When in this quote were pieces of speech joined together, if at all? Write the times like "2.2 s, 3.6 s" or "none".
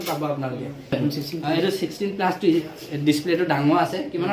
1.0 s